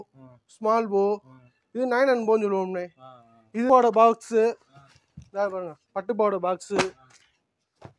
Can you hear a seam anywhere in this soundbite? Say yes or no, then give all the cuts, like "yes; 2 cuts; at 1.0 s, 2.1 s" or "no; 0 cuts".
yes; 1 cut; at 3.7 s